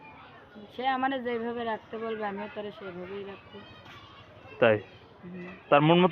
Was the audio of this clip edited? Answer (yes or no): no